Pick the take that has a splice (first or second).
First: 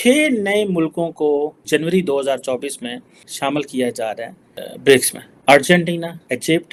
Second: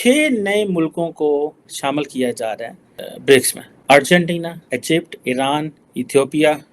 second